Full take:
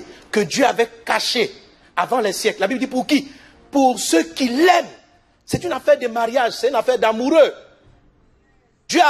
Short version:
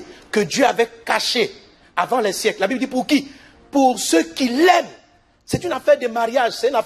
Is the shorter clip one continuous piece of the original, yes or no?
yes